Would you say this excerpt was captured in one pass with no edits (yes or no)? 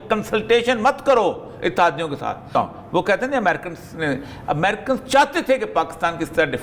no